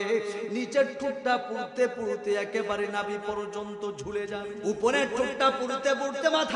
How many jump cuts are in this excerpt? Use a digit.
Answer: 1